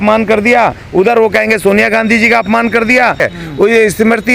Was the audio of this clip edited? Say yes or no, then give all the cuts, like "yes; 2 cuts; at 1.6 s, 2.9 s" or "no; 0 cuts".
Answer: yes; 1 cut; at 3.3 s